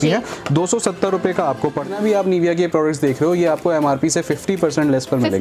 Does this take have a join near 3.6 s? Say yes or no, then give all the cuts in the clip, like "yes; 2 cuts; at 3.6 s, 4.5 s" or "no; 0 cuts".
no; 1 cut; at 1.9 s